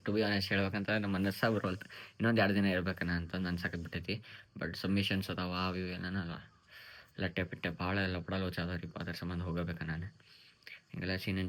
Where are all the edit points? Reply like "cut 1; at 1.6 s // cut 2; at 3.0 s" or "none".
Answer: none